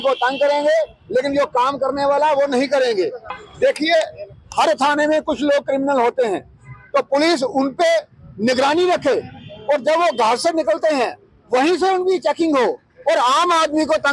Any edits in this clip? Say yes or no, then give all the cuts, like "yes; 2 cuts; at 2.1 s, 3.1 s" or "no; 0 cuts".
yes; 1 cut; at 3.3 s